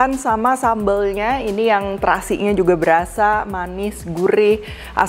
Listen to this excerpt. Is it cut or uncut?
uncut